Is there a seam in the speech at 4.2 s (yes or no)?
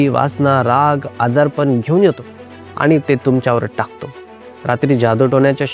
yes